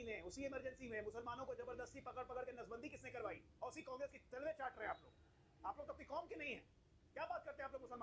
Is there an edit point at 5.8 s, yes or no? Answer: yes